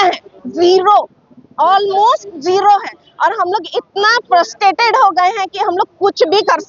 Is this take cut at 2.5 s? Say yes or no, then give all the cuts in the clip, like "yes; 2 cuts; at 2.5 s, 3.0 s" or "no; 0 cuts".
no; 0 cuts